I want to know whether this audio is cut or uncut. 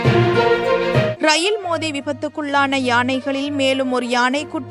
cut